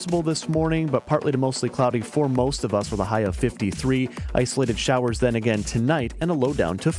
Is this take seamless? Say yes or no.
yes